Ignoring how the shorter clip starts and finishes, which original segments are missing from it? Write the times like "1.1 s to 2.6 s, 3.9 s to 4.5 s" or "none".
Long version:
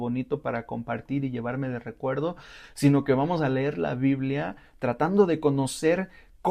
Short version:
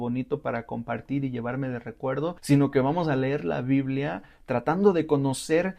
2.4 s to 2.7 s